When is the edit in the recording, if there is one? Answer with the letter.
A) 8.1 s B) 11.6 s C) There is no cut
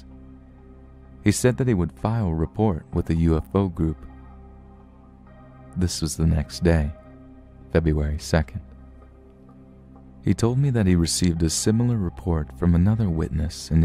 B